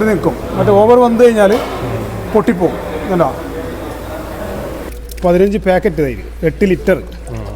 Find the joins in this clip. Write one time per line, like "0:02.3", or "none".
0:04.9